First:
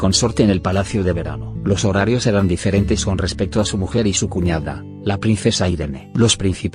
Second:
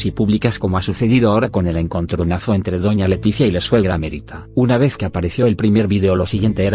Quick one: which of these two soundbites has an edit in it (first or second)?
first